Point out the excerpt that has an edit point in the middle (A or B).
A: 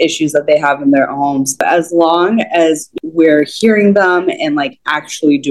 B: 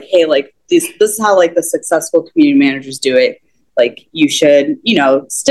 A